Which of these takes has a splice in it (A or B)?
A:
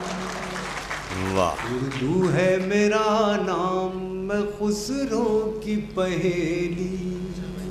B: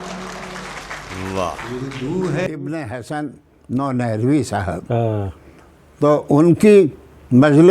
B